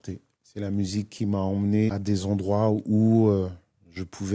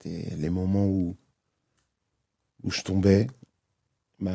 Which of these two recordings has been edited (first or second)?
first